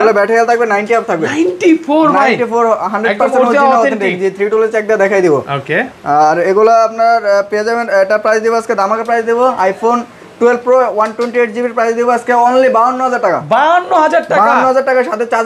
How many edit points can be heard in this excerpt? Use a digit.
0